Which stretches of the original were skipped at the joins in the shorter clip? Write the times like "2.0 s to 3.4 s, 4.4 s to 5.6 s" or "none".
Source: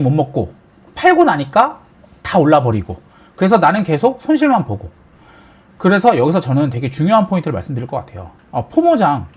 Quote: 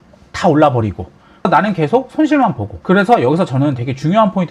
3.4 s to 3.6 s, 4.8 s to 5.6 s

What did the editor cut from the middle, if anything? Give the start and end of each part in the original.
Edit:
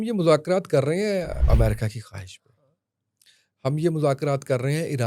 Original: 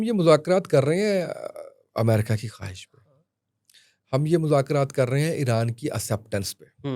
1.4 s to 1.8 s

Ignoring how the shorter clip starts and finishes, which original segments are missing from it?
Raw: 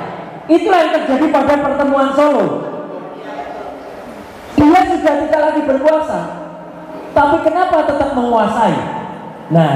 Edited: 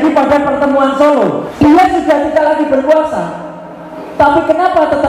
2.6 s to 4.4 s

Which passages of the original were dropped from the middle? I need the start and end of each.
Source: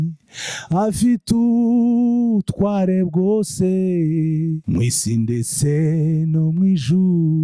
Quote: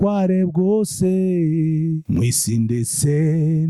none

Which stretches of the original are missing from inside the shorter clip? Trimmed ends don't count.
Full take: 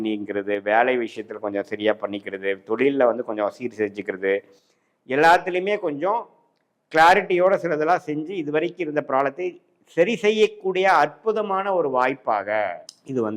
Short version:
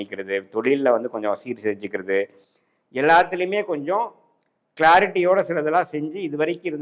none

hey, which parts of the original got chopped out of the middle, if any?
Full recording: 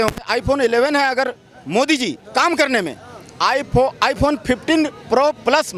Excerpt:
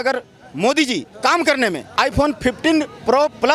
3.0 s to 3.9 s

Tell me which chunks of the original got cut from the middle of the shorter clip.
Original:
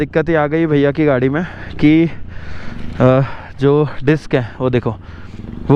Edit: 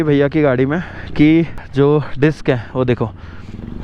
2.2 s to 3.5 s

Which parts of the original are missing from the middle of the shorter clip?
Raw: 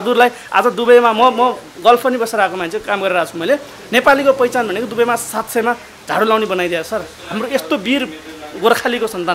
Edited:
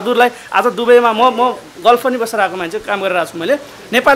none

